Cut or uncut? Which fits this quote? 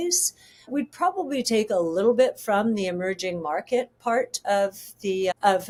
uncut